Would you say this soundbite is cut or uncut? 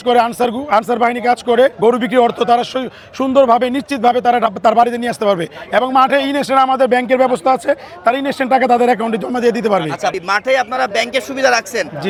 uncut